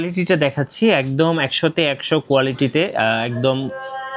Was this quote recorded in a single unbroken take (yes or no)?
yes